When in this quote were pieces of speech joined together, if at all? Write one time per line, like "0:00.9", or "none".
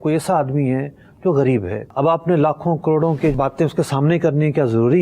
0:01.8
0:03.3